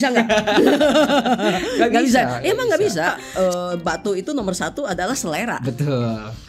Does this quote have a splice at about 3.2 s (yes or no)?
yes